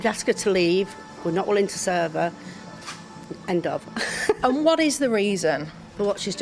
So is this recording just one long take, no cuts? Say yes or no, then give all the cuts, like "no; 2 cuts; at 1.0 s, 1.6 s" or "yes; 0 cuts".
no; 1 cut; at 1.0 s